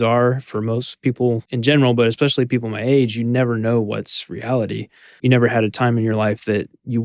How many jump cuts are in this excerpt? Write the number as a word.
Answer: one